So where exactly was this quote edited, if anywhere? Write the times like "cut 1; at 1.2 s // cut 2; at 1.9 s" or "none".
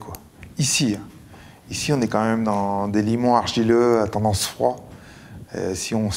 none